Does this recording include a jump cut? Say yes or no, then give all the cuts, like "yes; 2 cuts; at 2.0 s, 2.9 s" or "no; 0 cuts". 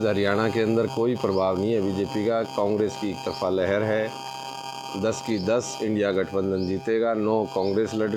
no; 0 cuts